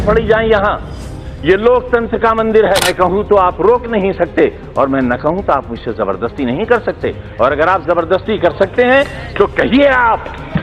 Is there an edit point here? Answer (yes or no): yes